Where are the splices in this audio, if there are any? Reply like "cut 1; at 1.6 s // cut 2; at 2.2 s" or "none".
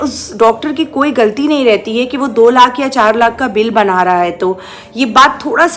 none